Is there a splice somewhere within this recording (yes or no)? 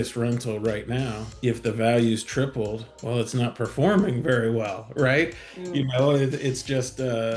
yes